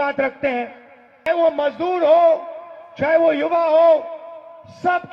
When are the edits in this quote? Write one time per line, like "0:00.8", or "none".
0:01.2